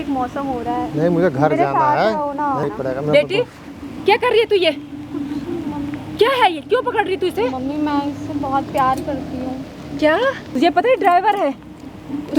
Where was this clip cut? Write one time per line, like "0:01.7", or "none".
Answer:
0:02.6
0:10.4